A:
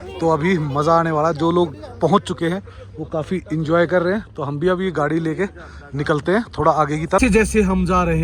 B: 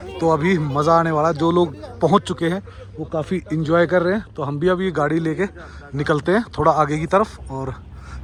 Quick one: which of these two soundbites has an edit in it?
A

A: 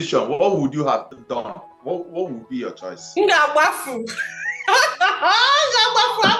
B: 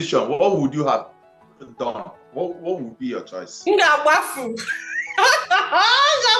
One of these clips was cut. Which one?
A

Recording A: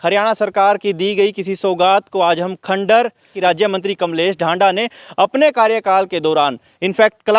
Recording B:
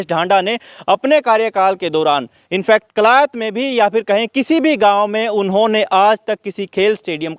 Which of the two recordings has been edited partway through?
A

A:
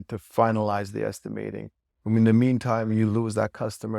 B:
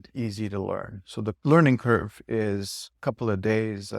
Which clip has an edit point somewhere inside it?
B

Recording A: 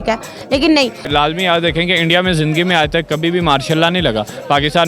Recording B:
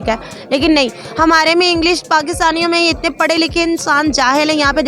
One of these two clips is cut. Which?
A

